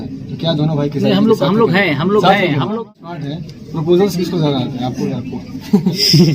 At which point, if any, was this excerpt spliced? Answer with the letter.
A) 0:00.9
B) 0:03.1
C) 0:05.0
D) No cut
B